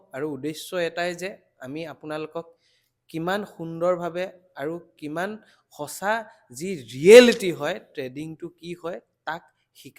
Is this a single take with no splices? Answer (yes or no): yes